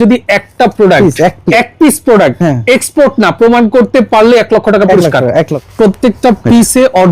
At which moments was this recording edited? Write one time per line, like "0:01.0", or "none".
0:01.4
0:05.6